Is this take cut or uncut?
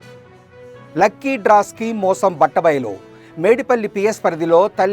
cut